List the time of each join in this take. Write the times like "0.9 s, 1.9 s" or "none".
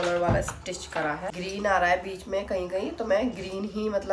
1.3 s